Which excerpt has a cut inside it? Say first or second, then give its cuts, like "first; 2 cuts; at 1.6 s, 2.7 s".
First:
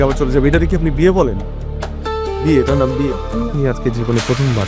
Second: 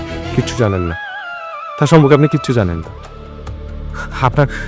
first; 1 cut; at 3.2 s